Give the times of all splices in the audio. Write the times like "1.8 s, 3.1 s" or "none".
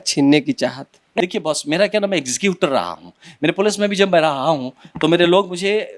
1.1 s

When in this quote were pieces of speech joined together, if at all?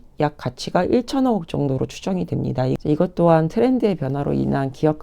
2.8 s

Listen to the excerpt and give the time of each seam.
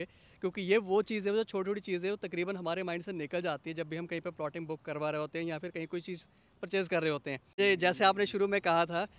7.6 s

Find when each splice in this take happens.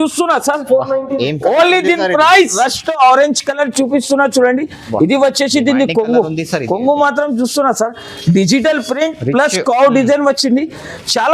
2.6 s

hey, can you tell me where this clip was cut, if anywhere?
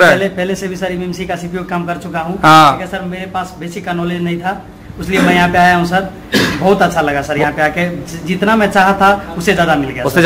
none

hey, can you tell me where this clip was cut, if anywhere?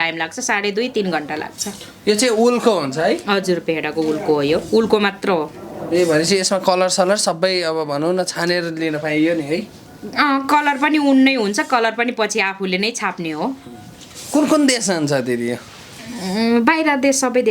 none

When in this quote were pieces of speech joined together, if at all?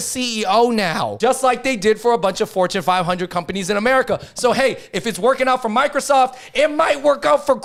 none

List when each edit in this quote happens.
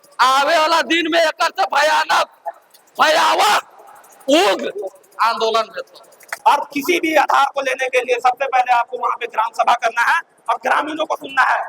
6.2 s

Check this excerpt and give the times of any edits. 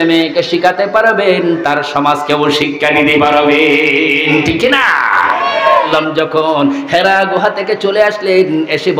5.9 s

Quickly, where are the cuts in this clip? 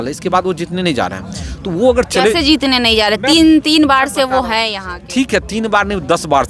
none

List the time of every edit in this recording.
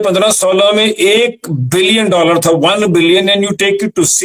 none

